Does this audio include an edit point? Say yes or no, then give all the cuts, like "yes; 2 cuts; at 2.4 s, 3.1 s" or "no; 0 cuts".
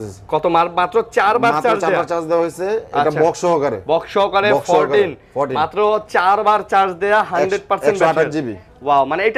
no; 0 cuts